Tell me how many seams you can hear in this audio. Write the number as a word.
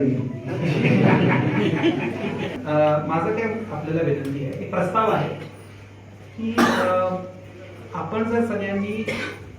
one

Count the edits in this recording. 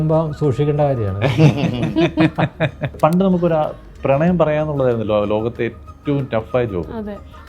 one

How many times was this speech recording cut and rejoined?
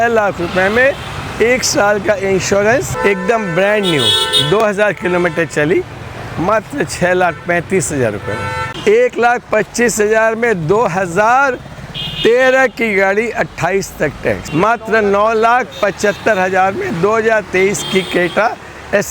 three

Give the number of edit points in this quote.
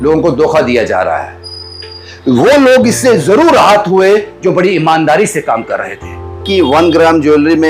one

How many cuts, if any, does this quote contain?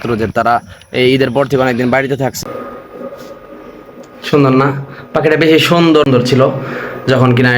two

